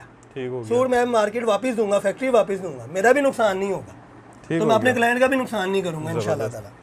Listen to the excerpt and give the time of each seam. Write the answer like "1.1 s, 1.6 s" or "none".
none